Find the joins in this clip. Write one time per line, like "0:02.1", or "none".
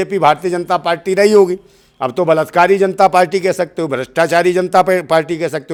none